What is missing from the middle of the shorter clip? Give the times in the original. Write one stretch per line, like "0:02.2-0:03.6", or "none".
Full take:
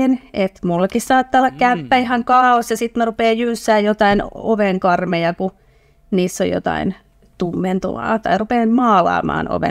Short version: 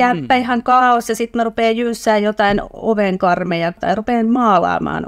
0:05.4-0:08.2